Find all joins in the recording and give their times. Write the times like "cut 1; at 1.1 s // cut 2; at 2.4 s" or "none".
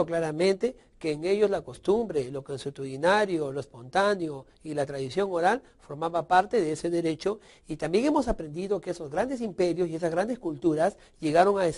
none